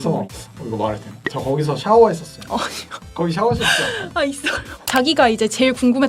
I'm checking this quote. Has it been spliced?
yes; 1 cut; at 4.8 s

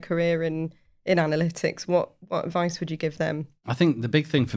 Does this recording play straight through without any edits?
yes; 0 cuts

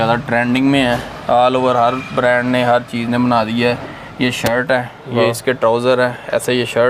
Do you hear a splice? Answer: no; 0 cuts

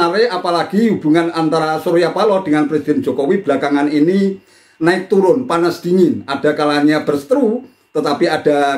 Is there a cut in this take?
no; 0 cuts

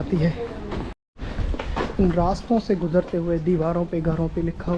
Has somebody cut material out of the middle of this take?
yes; 1 cut; at 1.0 s

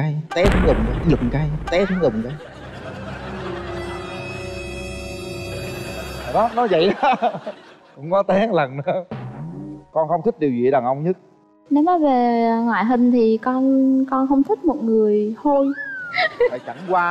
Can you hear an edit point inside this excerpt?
no; 0 cuts

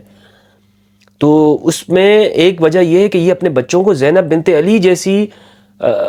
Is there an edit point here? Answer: no; 0 cuts

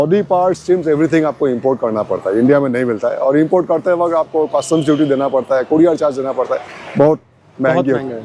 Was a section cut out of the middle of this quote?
no; 0 cuts

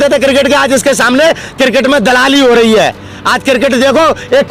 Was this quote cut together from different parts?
no; 0 cuts

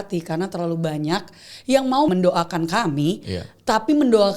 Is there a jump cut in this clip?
yes; 1 cut; at 2.1 s

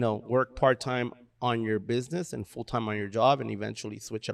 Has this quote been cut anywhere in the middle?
no; 0 cuts

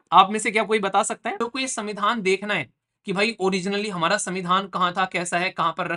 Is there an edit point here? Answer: yes; 1 cut; at 1.4 s

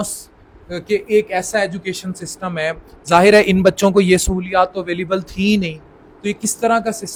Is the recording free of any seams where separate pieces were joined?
yes; 0 cuts

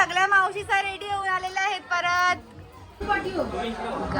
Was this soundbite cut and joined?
yes; 1 cut; at 3.0 s

